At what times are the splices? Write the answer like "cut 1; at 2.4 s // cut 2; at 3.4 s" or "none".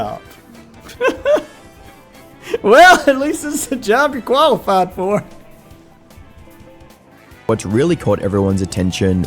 cut 1; at 7.5 s